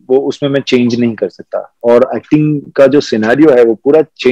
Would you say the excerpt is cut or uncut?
cut